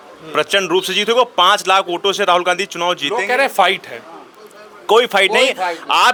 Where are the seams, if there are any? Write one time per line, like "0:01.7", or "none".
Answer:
none